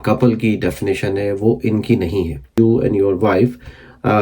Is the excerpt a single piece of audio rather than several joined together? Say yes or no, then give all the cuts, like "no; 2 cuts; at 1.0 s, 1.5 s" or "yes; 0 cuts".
no; 1 cut; at 2.5 s